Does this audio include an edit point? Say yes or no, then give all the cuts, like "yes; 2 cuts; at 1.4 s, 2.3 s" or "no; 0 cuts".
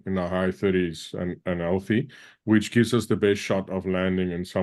no; 0 cuts